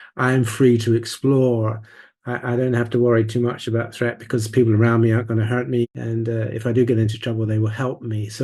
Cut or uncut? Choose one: cut